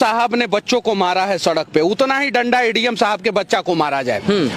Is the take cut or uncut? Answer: uncut